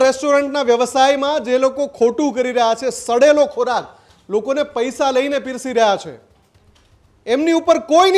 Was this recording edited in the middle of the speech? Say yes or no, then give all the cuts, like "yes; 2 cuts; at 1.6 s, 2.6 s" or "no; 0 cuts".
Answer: no; 0 cuts